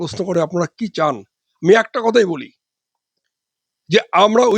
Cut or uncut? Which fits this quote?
uncut